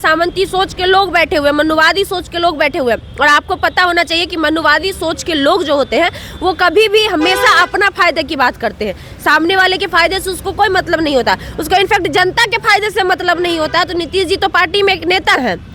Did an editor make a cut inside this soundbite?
no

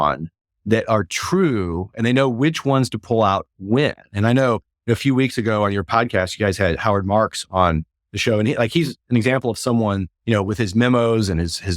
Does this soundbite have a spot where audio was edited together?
yes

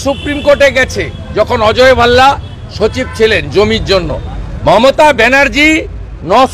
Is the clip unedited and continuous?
yes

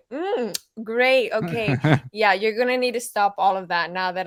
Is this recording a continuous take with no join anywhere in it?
yes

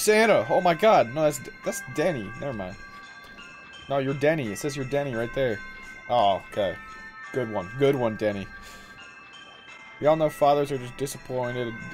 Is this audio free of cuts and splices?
yes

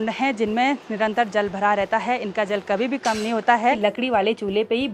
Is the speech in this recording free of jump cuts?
no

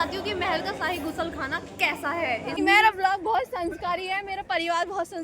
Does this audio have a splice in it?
yes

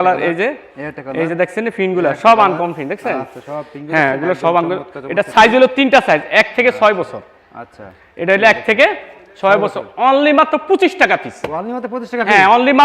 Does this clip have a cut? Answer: no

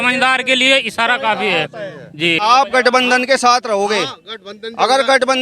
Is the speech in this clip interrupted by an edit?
yes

